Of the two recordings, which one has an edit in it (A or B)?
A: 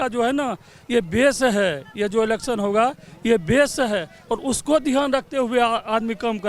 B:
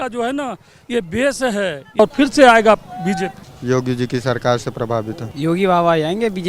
B